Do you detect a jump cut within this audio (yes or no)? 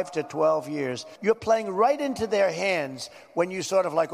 yes